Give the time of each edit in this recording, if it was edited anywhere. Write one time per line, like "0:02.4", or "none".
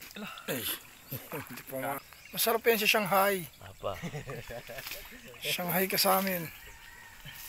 0:02.1